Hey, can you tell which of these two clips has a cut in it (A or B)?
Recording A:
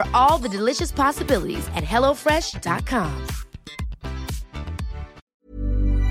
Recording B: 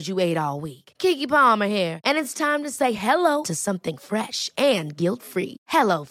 A